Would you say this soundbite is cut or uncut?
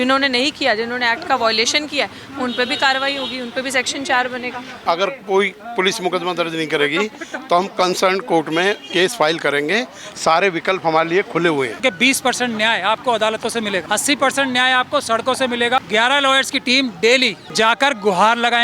cut